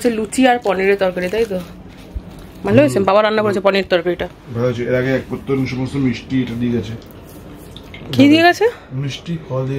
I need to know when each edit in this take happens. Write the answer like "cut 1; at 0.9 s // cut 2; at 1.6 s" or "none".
none